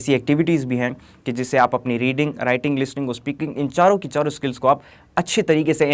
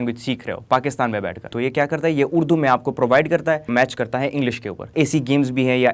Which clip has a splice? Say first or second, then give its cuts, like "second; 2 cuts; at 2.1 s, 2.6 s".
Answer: second; 3 cuts; at 1.5 s, 3.7 s, 4.9 s